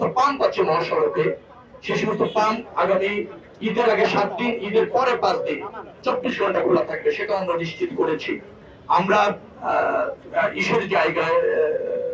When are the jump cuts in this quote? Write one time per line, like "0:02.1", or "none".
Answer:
none